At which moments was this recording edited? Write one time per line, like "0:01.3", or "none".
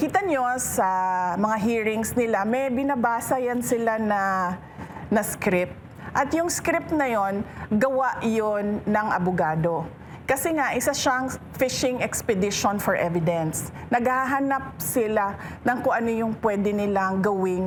none